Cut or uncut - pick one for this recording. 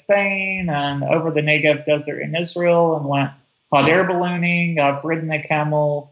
uncut